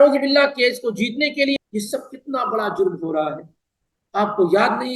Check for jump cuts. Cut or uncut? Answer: cut